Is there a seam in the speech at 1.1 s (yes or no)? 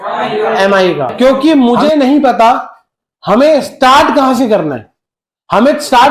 yes